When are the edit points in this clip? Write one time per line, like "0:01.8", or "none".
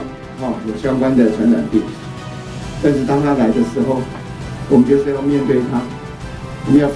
none